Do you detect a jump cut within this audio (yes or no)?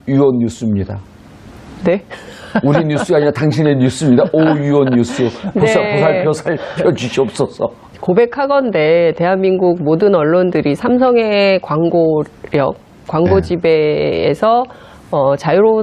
yes